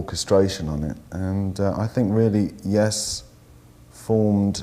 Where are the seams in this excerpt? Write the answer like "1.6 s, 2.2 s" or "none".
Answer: 2.0 s